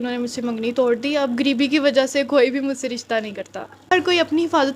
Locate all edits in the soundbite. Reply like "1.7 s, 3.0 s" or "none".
3.9 s